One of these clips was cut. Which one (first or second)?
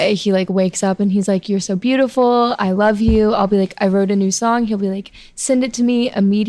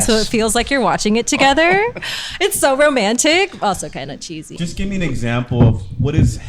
second